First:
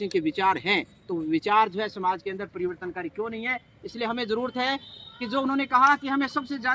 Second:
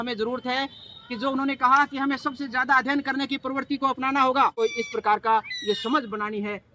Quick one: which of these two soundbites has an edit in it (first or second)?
second